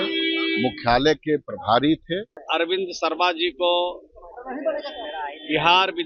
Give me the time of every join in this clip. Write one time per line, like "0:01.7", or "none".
0:02.3

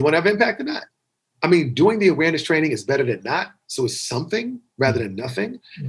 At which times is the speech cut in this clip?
none

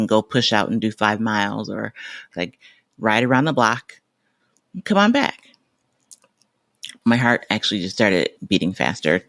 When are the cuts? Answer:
0:02.3
0:08.3

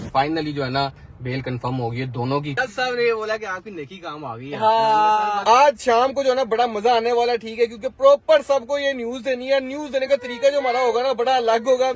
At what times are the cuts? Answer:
0:02.6
0:05.4

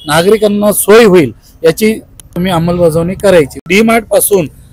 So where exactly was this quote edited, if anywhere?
0:02.3
0:03.7

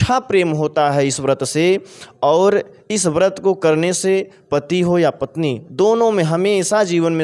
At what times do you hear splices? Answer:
none

